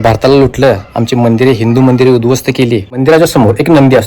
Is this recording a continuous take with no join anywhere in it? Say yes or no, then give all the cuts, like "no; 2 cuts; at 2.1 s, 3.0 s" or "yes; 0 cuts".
no; 1 cut; at 2.9 s